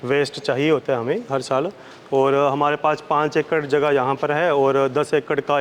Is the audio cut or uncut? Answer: uncut